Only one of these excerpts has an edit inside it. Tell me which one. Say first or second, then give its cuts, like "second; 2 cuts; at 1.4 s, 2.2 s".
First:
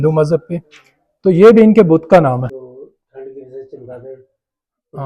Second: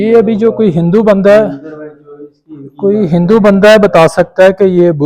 first; 1 cut; at 2.5 s